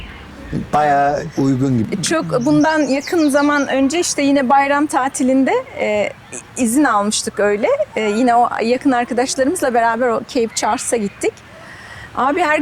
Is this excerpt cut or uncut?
cut